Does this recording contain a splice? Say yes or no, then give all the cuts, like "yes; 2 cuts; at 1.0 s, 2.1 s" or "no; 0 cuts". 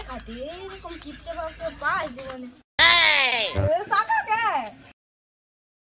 yes; 1 cut; at 3.3 s